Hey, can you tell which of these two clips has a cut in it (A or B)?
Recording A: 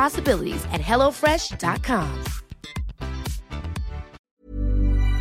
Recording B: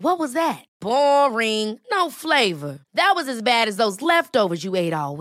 A